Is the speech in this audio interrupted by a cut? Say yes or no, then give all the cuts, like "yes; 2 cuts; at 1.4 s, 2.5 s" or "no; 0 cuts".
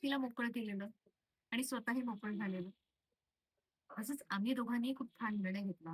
no; 0 cuts